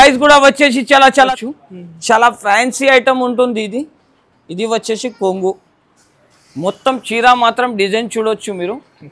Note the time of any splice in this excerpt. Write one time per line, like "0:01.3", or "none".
0:01.3